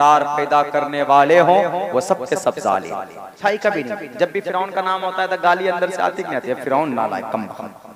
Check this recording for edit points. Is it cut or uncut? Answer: cut